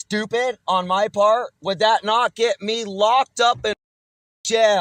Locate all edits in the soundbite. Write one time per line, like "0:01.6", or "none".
none